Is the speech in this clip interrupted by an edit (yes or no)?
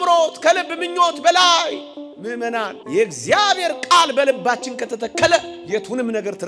yes